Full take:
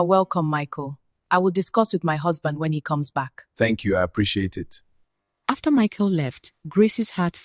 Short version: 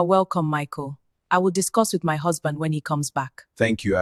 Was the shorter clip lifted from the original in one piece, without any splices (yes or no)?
yes